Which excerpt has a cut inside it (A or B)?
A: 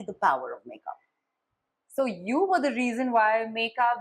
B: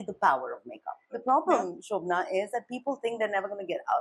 B